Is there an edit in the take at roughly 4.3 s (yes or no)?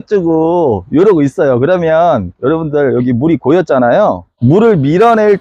yes